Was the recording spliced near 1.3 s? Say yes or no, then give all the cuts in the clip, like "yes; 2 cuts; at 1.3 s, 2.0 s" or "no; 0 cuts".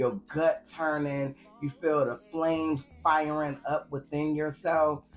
yes; 1 cut; at 1.3 s